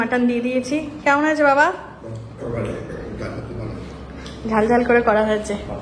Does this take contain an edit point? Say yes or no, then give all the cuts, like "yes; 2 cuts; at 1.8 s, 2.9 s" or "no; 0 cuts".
no; 0 cuts